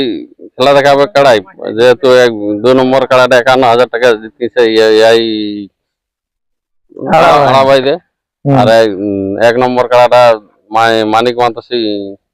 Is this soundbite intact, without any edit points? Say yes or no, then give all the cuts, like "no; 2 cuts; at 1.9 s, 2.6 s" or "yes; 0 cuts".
yes; 0 cuts